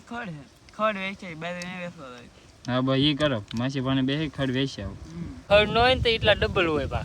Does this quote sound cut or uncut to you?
cut